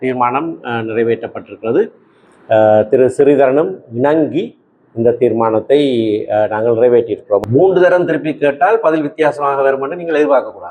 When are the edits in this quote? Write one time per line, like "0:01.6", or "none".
0:07.4